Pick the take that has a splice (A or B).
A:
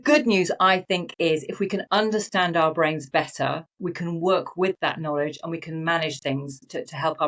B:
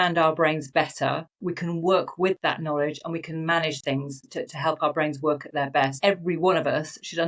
B